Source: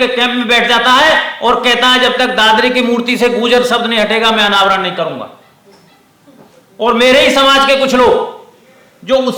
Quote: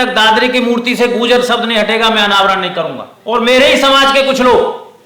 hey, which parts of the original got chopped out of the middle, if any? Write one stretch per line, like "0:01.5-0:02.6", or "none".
0:05.3-0:06.6